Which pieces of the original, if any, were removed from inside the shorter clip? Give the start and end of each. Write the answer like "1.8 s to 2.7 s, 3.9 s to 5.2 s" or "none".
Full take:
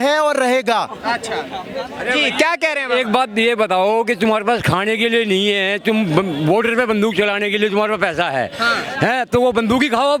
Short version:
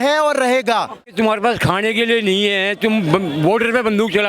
1.1 s to 4.1 s